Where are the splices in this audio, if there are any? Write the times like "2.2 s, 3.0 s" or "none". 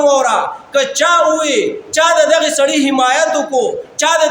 none